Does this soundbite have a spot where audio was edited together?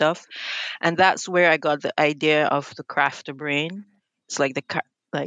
no; 0 cuts

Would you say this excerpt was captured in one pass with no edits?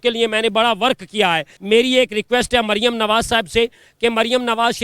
no; 1 cut; at 1.5 s

